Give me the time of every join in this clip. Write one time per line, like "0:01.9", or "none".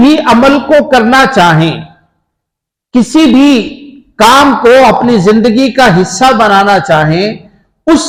none